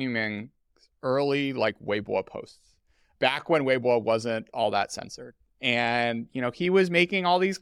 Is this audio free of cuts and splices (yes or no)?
no